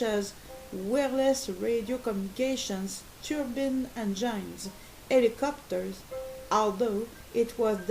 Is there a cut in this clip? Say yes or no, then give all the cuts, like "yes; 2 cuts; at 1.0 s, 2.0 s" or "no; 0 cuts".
yes; 1 cut; at 5.6 s